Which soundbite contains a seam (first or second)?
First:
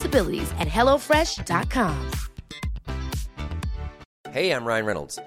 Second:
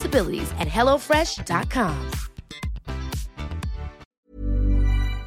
second